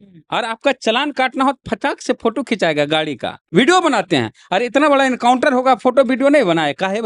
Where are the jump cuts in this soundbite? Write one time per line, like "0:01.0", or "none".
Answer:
0:03.4